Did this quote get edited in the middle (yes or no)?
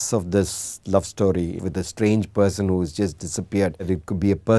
yes